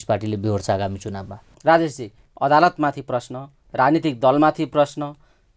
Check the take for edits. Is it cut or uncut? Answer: cut